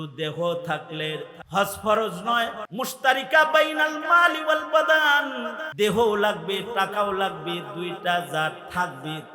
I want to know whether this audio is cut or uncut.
cut